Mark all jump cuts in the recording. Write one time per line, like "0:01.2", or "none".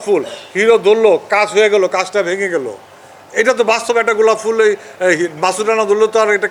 none